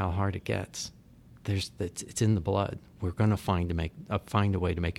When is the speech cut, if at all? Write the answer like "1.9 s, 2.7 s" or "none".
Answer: none